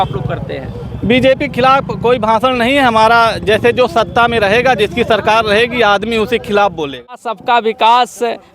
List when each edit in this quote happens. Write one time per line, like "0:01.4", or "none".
0:07.4